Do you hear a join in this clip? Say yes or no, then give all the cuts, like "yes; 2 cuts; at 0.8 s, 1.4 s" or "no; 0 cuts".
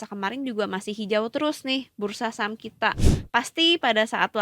yes; 1 cut; at 3.1 s